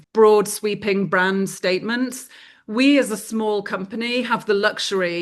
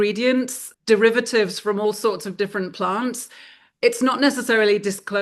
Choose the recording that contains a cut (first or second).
first